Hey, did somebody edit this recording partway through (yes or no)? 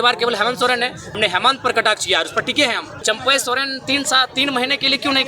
yes